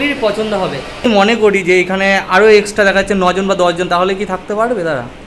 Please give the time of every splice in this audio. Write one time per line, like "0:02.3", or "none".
0:01.0